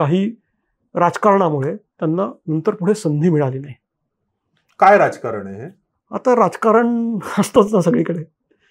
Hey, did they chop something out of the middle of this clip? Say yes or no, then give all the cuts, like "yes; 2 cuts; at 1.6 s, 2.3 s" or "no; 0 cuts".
no; 0 cuts